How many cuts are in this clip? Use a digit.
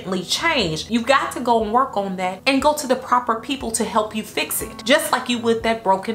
0